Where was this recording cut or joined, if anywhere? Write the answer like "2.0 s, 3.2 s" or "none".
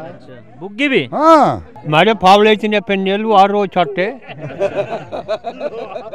1.8 s

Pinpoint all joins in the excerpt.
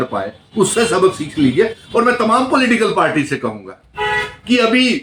none

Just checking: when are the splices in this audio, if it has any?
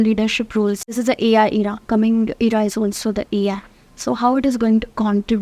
0.9 s

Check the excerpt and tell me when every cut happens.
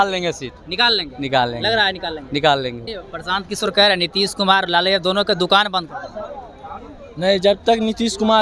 2.9 s

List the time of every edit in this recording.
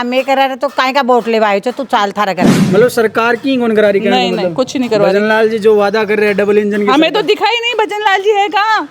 2.6 s

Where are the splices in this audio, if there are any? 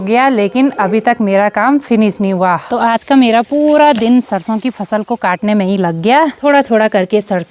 2.7 s, 6.4 s

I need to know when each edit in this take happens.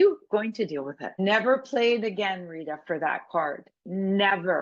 1.2 s

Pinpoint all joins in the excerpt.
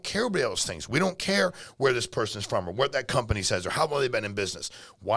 none

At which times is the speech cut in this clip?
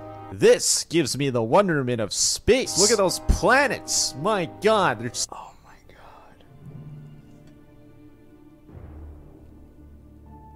2.7 s, 5.3 s

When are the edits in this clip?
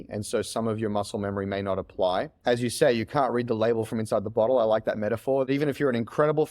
2.3 s, 5.5 s

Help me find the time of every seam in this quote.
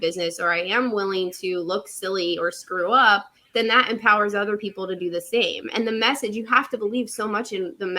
3.4 s

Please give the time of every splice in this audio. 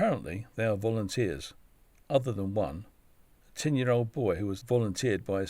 4.6 s

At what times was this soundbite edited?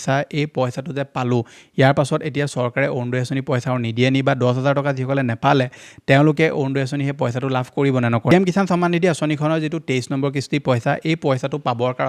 8.3 s

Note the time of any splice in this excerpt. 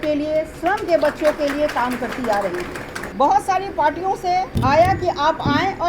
3.0 s, 4.5 s

